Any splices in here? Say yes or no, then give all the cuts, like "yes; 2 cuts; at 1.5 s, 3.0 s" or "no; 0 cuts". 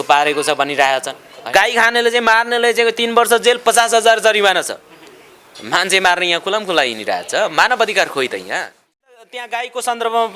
yes; 2 cuts; at 1.4 s, 9.1 s